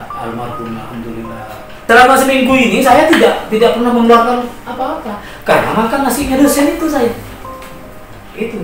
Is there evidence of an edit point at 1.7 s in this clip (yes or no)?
yes